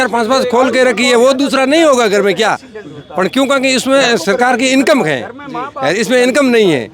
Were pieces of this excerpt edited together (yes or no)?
no